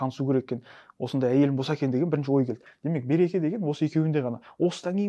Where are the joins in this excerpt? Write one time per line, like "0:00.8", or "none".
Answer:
0:02.7